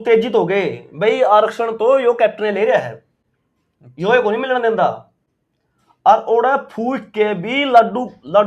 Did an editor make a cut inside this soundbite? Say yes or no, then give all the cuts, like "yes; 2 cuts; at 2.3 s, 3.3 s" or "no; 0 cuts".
no; 0 cuts